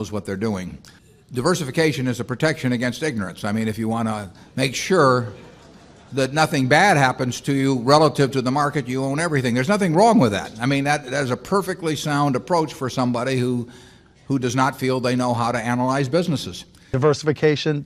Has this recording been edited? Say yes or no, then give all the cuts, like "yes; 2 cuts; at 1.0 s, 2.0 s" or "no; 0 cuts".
yes; 1 cut; at 16.9 s